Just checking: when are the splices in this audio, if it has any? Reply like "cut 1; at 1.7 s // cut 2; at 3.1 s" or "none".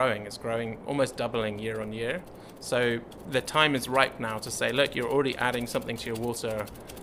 none